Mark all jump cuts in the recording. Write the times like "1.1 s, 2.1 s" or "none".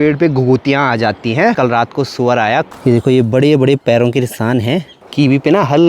1.6 s, 2.7 s, 5.0 s